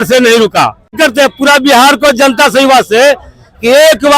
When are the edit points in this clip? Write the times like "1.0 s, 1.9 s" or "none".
0.9 s